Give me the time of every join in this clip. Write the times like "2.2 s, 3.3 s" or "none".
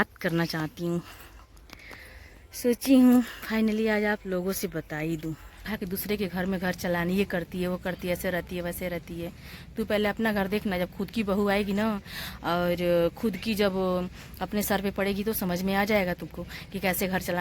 5.7 s